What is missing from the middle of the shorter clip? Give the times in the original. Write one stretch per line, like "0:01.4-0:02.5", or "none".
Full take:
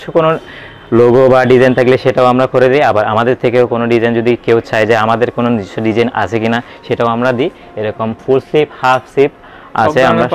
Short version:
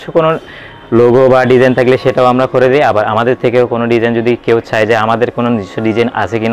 none